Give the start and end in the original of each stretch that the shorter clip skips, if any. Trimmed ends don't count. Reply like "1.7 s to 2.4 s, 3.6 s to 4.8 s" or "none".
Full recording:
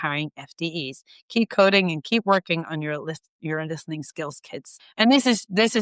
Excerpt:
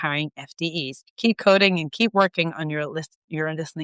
1.0 s to 1.1 s